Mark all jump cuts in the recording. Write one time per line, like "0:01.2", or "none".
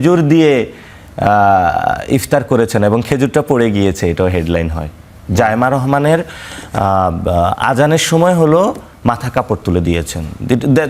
none